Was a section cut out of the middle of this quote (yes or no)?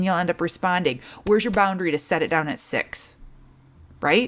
no